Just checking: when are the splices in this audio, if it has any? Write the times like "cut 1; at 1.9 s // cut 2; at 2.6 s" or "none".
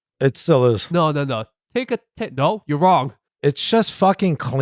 cut 1; at 3.2 s

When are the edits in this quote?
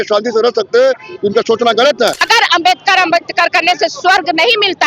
cut 1; at 2.2 s

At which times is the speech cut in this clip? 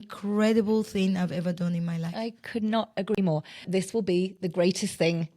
cut 1; at 3.7 s

